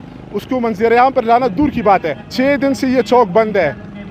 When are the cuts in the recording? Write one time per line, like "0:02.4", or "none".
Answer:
0:02.2